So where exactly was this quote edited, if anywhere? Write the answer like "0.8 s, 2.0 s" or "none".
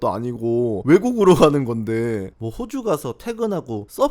0.8 s, 2.3 s